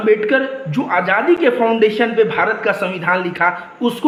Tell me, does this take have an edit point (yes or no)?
no